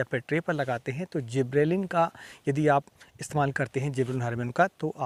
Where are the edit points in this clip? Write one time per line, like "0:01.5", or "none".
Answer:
none